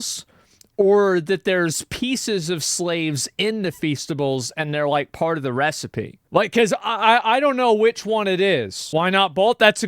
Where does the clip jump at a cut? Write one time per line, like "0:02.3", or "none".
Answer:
0:08.8